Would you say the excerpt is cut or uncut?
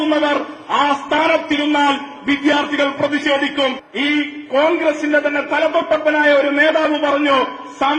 cut